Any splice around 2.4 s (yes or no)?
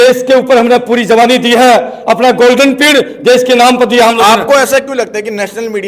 no